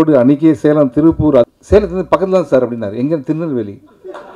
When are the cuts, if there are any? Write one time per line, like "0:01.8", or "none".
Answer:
0:01.5